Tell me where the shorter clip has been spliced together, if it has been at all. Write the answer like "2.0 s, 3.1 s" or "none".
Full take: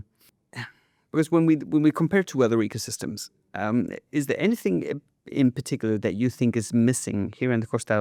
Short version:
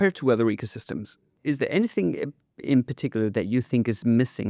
1.3 s